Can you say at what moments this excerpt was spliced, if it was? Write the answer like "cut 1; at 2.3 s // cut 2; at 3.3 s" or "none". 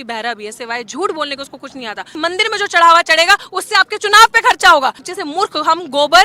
cut 1; at 2.2 s // cut 2; at 5.0 s